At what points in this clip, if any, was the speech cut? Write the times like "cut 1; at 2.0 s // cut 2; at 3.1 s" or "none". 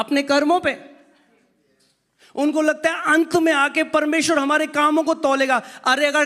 none